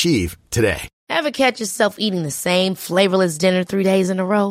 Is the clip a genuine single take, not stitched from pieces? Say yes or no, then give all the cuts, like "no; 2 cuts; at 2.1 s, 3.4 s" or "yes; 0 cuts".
no; 1 cut; at 0.9 s